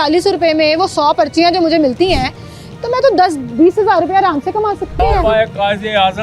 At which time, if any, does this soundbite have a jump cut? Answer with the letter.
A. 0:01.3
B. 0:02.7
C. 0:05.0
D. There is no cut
C